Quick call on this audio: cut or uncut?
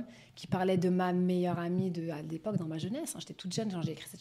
uncut